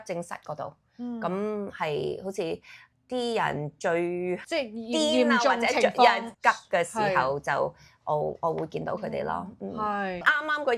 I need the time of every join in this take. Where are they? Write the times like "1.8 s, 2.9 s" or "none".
none